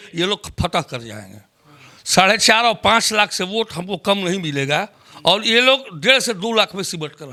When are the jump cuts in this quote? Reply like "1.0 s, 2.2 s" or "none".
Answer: none

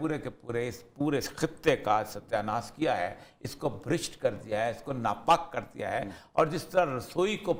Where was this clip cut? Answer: none

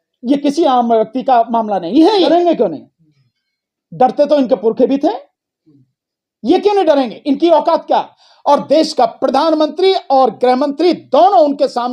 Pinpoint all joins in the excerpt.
2.3 s, 8.2 s

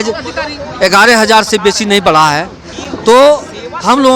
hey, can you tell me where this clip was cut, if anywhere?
none

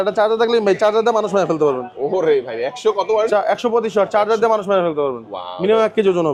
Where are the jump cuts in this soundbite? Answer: none

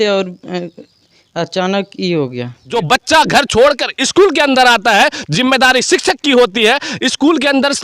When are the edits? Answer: 2.7 s

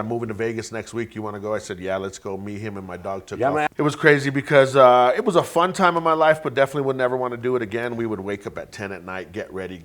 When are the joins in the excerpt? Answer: 3.7 s

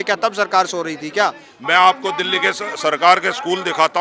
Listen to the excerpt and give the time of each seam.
1.5 s

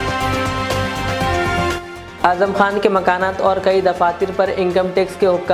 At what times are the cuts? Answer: 2.0 s

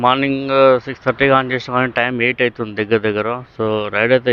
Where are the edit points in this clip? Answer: none

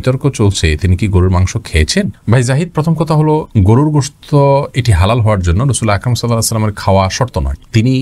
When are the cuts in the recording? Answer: none

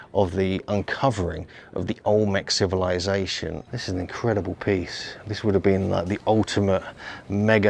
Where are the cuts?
3.6 s

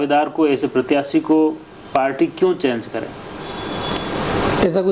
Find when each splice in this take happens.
none

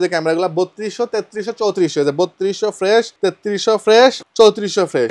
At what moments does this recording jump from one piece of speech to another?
3.1 s, 4.2 s

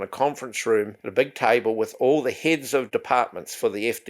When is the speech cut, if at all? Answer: 1.0 s, 2.9 s

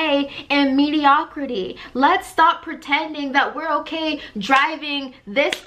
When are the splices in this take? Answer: none

